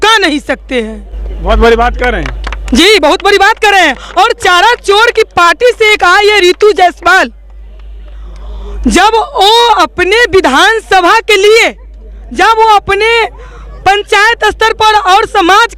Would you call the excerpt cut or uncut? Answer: uncut